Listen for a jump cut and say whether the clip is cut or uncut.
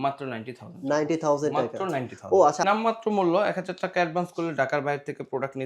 cut